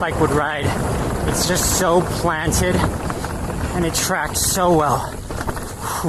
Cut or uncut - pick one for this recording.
uncut